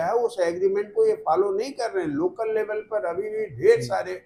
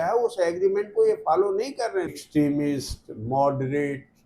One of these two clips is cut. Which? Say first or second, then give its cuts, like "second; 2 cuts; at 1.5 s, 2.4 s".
second; 1 cut; at 2.1 s